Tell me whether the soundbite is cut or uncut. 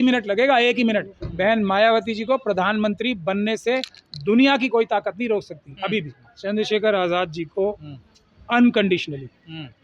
cut